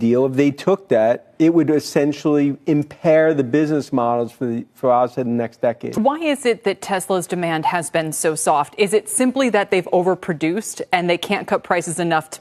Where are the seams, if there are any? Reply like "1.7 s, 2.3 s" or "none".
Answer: 5.9 s